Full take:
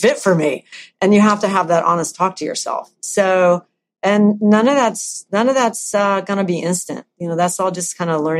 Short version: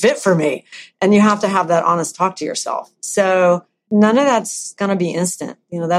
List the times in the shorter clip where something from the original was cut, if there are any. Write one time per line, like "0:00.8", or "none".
0:03.9
0:04.8